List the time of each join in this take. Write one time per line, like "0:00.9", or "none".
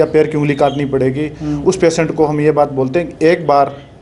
none